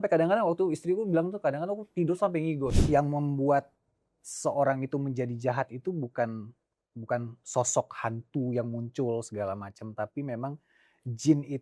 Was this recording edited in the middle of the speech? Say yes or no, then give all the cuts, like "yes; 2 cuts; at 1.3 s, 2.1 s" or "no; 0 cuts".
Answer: yes; 1 cut; at 2.8 s